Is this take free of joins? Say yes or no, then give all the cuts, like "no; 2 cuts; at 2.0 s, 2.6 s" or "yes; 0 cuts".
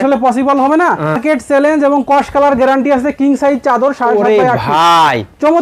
no; 1 cut; at 1.2 s